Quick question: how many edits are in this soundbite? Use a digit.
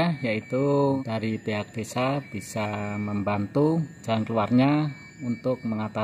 2